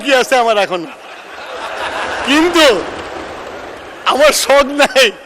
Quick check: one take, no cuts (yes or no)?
yes